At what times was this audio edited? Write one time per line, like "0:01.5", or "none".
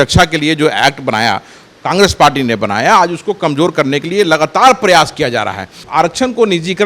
0:05.8